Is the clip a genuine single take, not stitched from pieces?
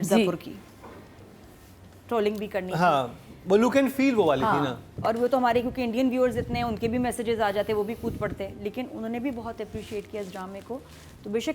yes; 0 cuts

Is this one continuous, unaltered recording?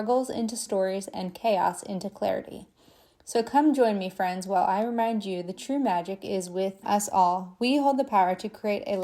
no; 1 cut; at 6.8 s

